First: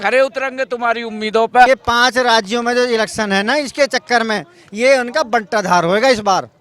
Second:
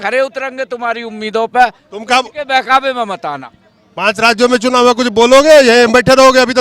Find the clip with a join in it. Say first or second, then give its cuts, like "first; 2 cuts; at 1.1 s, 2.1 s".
first; 1 cut; at 1.7 s